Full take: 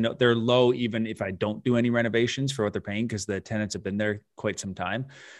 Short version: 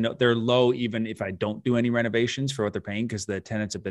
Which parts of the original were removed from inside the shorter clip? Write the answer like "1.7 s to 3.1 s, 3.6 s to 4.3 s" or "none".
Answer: none